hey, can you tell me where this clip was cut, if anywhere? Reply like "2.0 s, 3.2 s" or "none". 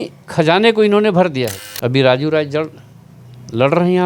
1.6 s